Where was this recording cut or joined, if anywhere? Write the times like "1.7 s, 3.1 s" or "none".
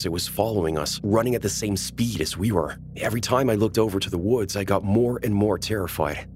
none